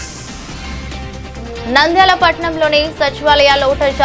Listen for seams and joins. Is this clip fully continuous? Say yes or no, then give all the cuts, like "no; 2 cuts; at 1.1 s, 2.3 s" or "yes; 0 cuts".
no; 1 cut; at 0.9 s